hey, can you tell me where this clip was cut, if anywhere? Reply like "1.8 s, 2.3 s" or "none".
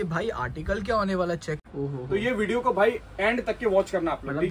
1.6 s